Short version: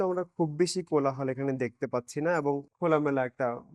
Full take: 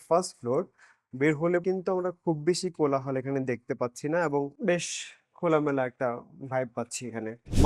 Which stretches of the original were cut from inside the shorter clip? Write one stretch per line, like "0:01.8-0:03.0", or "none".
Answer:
0:04.5-0:05.3